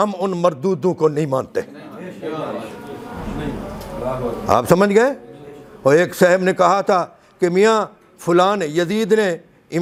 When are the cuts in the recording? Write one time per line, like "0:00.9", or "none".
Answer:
none

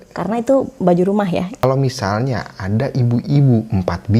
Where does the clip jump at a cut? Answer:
0:01.6

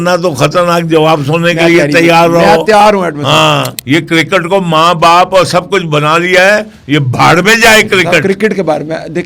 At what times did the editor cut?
0:03.7

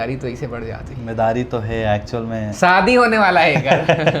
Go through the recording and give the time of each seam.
none

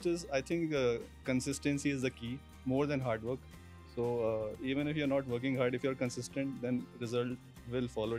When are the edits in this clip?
none

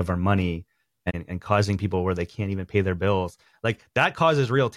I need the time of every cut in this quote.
0:01.1

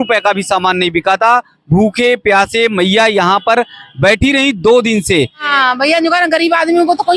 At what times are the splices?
0:05.4

